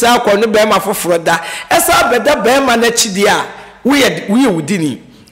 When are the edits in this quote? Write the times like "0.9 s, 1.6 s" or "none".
none